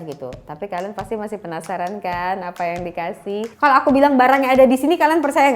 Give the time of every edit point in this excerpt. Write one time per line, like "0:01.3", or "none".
0:03.5